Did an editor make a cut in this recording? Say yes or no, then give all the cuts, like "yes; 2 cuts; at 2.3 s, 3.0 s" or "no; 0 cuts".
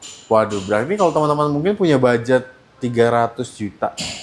no; 0 cuts